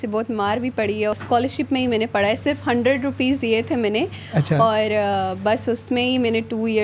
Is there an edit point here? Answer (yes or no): yes